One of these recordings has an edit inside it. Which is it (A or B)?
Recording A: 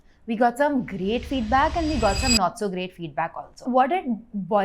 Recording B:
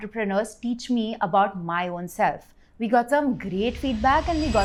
A